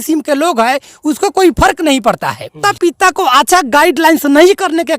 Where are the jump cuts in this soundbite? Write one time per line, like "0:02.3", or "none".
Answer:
0:02.7